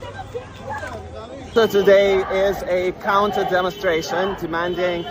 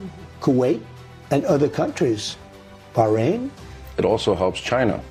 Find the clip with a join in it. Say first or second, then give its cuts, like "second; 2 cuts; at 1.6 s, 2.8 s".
first; 1 cut; at 3.2 s